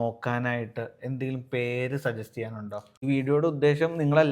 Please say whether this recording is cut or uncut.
cut